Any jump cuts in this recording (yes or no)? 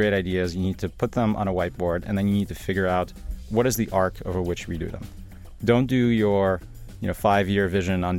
yes